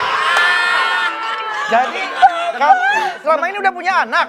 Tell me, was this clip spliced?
no; 0 cuts

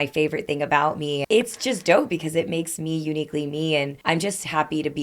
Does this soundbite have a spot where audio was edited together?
yes; 2 cuts; at 1.2 s, 3.9 s

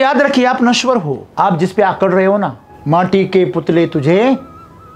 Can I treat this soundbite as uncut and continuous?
no; 2 cuts; at 1.2 s, 2.7 s

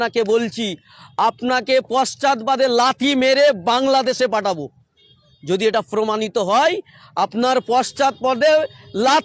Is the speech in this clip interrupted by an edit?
no; 0 cuts

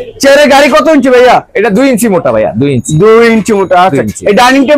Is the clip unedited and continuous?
yes; 0 cuts

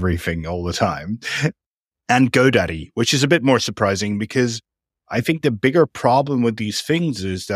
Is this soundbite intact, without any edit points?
no; 1 cut; at 1.6 s

